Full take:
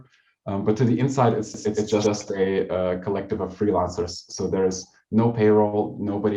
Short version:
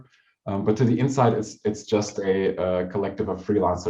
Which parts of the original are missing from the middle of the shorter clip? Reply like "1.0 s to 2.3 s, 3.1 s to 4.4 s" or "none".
2.0 s to 2.1 s